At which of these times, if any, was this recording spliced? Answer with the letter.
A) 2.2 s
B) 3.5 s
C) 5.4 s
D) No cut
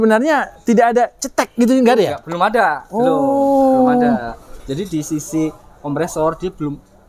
D